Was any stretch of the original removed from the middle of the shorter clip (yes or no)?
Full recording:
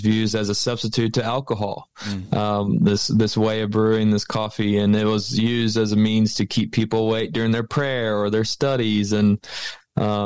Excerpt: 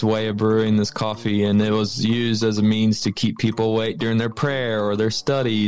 no